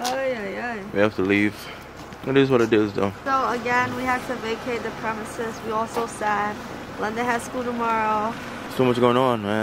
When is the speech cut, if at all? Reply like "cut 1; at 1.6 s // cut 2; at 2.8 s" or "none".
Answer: cut 1; at 3.2 s // cut 2; at 8.6 s